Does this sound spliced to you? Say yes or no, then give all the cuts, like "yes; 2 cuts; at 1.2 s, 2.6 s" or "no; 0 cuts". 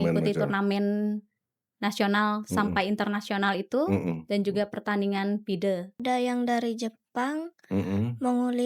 yes; 1 cut; at 6.0 s